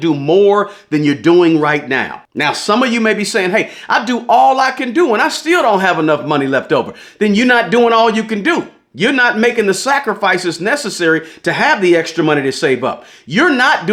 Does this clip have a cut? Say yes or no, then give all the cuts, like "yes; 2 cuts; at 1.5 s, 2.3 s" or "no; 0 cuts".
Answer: no; 0 cuts